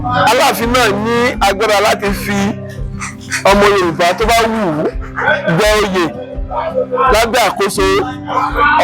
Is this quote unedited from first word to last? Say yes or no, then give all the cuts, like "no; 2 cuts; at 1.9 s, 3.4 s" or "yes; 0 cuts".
yes; 0 cuts